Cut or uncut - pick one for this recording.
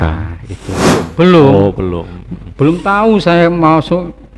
cut